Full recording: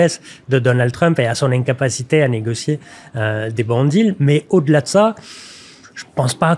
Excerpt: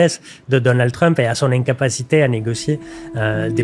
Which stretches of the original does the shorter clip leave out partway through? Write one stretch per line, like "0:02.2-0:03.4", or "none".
none